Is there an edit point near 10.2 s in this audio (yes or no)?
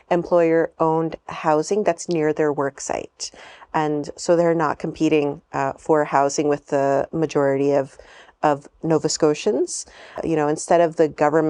yes